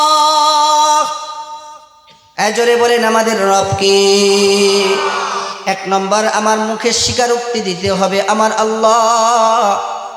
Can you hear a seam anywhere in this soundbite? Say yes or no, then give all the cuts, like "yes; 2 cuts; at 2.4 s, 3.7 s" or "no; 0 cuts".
yes; 1 cut; at 5.5 s